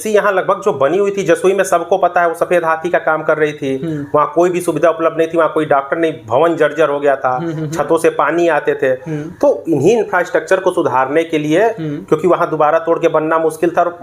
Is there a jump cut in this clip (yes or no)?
no